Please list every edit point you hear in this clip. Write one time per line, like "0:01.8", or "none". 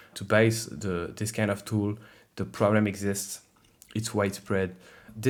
none